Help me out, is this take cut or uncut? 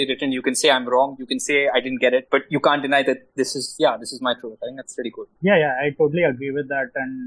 uncut